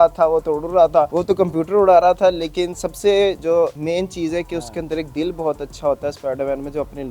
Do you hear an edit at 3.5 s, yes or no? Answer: yes